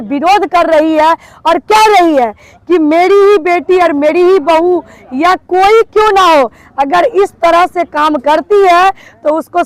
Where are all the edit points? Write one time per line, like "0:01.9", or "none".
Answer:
none